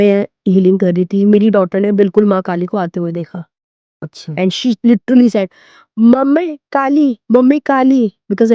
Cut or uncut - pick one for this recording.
uncut